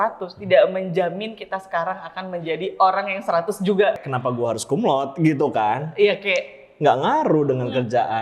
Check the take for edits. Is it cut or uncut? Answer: cut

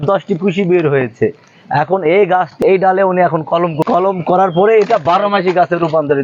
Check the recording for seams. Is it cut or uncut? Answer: cut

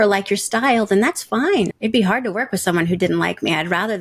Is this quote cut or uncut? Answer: cut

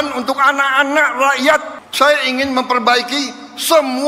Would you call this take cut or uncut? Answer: cut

